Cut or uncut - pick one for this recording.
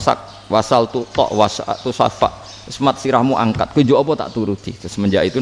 uncut